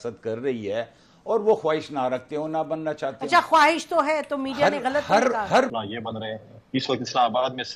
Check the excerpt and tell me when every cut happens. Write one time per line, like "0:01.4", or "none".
0:05.7